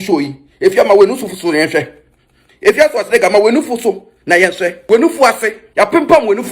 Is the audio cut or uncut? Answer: cut